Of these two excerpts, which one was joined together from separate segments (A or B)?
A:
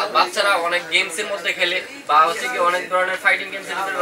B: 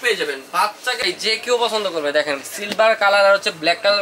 B